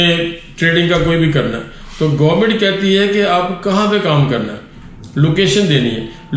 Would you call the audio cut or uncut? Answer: uncut